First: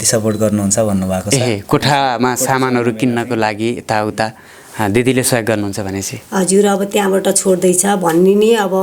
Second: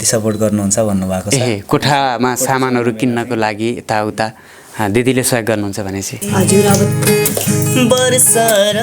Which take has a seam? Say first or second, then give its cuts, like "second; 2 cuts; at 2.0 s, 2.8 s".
second; 1 cut; at 6.8 s